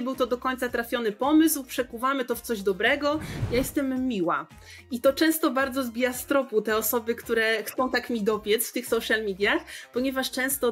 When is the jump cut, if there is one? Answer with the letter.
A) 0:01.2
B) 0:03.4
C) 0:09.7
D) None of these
B